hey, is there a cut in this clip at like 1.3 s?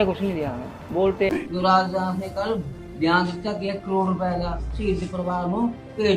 yes; 1 cut; at 1.3 s

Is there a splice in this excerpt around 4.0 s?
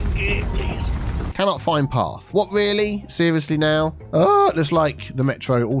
yes; 2 cuts; at 1.3 s, 4.0 s

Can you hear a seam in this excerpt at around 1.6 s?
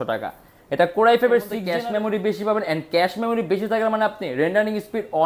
yes; 1 cut; at 1.6 s

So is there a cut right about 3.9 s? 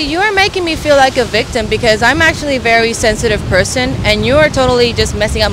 no; 0 cuts

